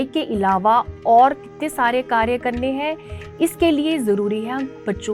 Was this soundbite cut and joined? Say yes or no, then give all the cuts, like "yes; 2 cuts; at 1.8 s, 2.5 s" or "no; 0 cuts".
no; 0 cuts